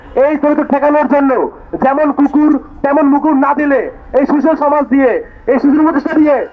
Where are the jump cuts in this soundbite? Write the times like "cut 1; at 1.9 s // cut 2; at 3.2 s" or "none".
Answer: none